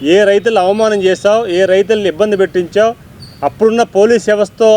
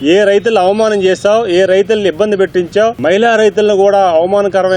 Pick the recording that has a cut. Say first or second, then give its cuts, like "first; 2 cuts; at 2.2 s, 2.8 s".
second; 1 cut; at 3.0 s